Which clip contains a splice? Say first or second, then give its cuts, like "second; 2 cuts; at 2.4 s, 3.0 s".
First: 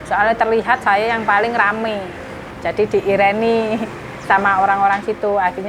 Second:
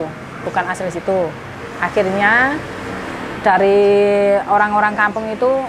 first; 1 cut; at 2.4 s